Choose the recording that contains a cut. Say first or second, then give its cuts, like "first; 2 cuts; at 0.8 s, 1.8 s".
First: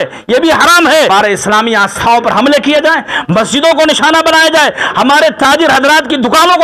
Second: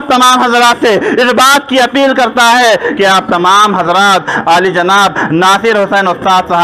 first; 1 cut; at 1.1 s